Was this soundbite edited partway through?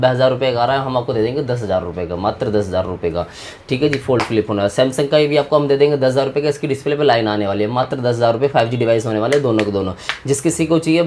no; 0 cuts

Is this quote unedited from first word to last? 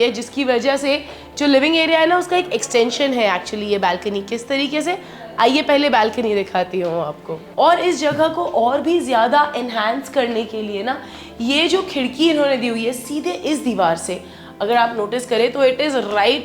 no; 1 cut; at 7.4 s

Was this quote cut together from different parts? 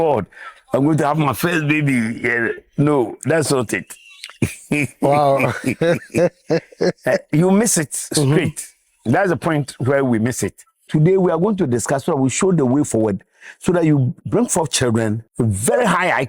yes; 3 cuts; at 10.8 s, 14.2 s, 15.2 s

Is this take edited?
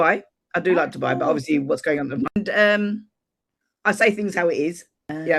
yes; 1 cut; at 2.3 s

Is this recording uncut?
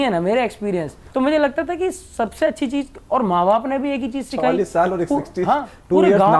yes; 0 cuts

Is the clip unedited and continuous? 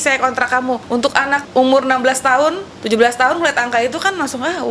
no; 2 cuts; at 1.0 s, 2.7 s

